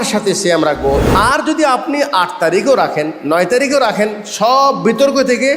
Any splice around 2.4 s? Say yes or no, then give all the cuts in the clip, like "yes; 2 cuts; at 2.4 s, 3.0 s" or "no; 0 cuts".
no; 1 cut; at 1.0 s